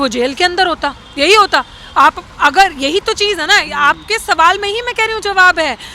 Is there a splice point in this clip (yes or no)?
no